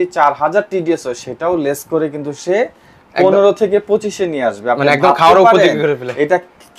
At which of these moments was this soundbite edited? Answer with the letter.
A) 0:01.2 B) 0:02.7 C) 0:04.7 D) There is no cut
D